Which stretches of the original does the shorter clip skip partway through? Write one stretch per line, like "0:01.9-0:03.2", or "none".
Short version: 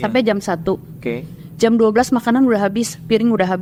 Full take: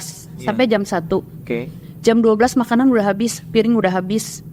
none